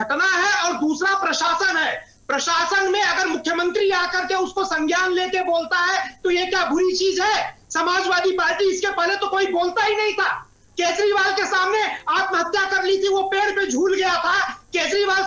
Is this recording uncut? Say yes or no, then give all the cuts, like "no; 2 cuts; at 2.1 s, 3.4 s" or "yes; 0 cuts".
yes; 0 cuts